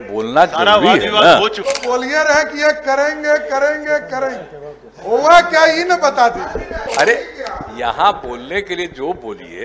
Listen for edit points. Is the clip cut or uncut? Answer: cut